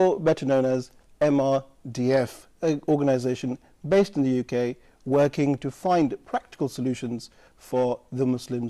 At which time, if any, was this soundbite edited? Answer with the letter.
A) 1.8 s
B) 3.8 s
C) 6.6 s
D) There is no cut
A